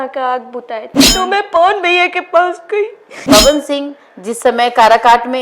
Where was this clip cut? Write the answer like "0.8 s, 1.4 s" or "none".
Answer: 1.0 s, 3.1 s

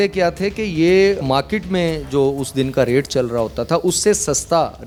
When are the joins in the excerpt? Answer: none

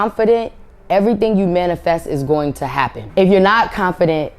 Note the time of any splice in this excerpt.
3.0 s

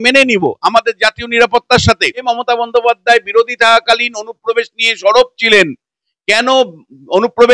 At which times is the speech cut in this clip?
2.2 s

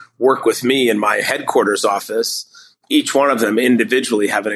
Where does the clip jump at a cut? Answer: none

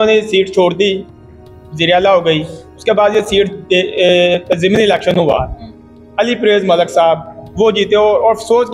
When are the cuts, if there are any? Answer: none

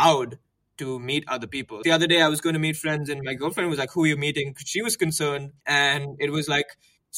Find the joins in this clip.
1.8 s, 5.5 s

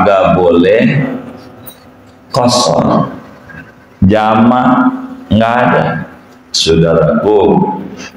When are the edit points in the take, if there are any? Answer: 6.5 s

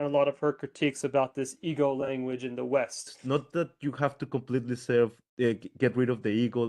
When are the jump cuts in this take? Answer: 3.1 s

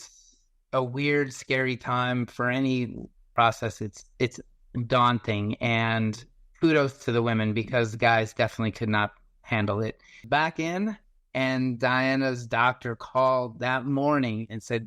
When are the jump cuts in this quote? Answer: 3.3 s, 10.2 s

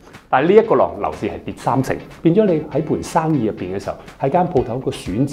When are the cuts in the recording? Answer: 2.1 s

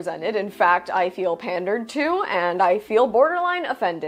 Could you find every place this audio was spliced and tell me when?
none

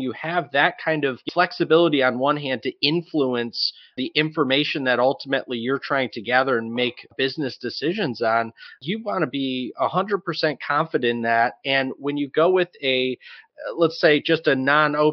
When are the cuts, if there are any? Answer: 1.2 s, 7.1 s

